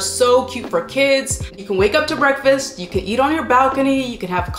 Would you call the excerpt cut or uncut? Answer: cut